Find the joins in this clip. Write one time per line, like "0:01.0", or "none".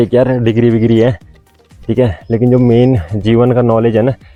none